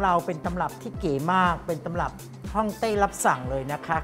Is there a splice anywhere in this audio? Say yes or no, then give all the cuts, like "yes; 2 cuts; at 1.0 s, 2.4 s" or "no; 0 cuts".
no; 0 cuts